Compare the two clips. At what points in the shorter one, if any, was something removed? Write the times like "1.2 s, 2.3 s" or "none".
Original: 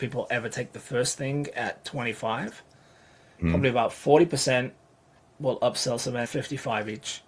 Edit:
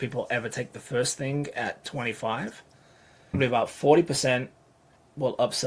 3.3 s